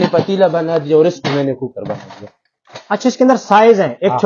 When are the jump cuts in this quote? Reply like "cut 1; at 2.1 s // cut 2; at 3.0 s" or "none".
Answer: none